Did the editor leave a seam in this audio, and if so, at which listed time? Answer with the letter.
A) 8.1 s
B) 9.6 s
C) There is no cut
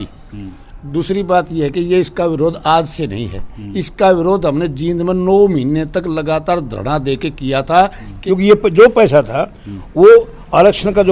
A